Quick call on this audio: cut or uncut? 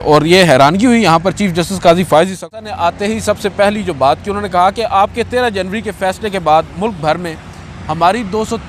cut